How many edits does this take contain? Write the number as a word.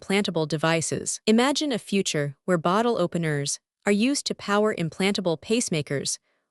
one